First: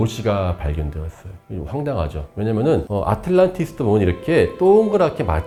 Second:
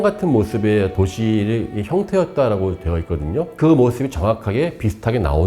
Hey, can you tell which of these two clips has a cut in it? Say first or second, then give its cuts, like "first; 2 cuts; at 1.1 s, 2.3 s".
second; 2 cuts; at 0.9 s, 3.5 s